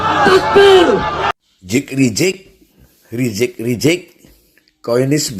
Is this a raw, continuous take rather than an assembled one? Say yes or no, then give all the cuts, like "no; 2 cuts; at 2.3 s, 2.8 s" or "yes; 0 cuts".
no; 1 cut; at 1.2 s